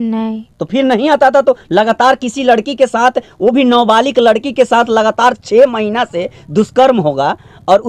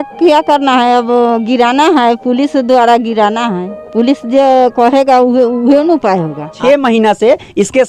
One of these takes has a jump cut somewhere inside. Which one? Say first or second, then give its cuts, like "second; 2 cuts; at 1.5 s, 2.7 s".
second; 1 cut; at 6.5 s